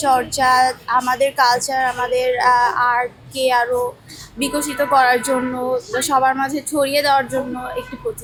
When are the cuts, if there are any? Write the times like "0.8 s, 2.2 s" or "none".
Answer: none